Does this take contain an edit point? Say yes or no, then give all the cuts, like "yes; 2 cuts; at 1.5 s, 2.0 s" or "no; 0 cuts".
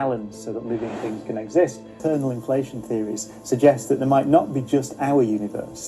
yes; 1 cut; at 1.9 s